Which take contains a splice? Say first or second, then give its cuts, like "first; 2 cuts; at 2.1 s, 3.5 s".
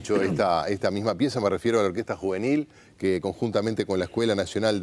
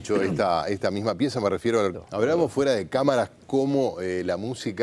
first; 1 cut; at 2.0 s